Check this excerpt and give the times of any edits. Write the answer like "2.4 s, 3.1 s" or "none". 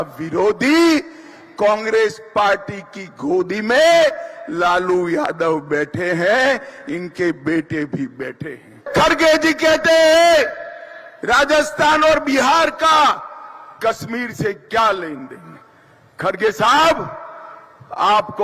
8.9 s